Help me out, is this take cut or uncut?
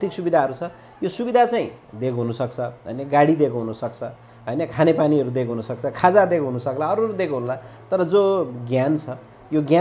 uncut